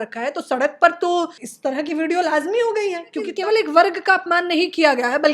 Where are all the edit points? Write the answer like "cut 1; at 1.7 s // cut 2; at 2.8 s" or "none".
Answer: cut 1; at 1.4 s // cut 2; at 3.3 s